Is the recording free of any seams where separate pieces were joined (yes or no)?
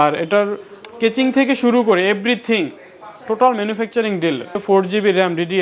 no